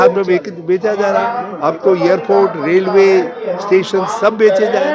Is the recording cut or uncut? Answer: uncut